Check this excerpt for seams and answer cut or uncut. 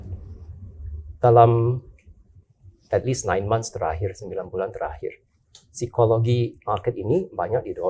uncut